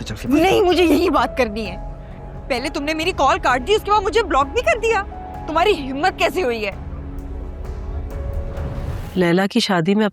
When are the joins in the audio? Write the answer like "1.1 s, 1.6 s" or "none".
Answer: 9.0 s